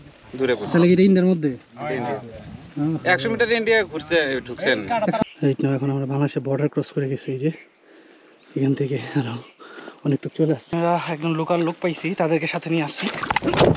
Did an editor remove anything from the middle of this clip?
yes; 2 cuts; at 5.2 s, 10.7 s

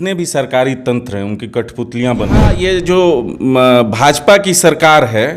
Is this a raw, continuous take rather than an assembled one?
no; 1 cut; at 2.6 s

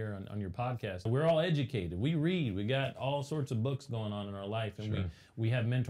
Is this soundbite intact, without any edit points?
no; 1 cut; at 1.1 s

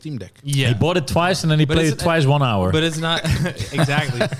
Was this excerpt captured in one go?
yes; 0 cuts

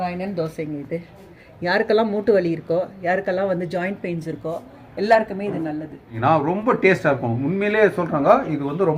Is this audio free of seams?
no; 2 cuts; at 1.4 s, 6.2 s

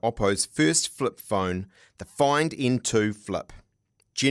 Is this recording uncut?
yes; 0 cuts

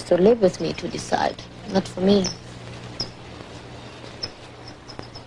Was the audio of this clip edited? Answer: no; 0 cuts

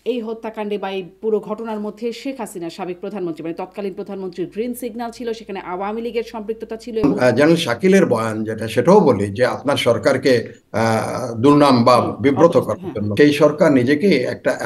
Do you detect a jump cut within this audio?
yes; 2 cuts; at 7.0 s, 13.1 s

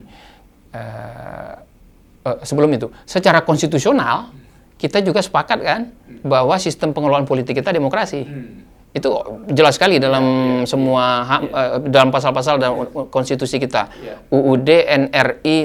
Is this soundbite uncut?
yes; 0 cuts

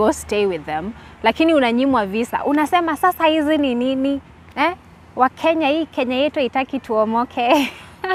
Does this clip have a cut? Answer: no; 0 cuts

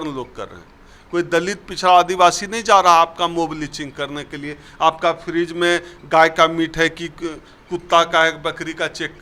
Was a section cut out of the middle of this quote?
no; 0 cuts

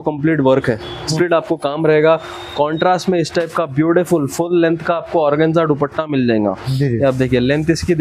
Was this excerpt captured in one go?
no; 1 cut; at 1.1 s

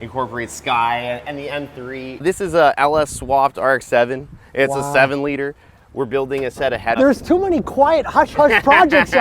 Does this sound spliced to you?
yes; 2 cuts; at 2.2 s, 6.9 s

